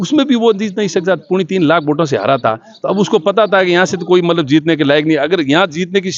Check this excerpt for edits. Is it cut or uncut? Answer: uncut